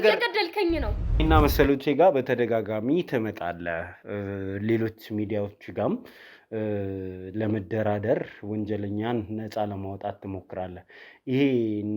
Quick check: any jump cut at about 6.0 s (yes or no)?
no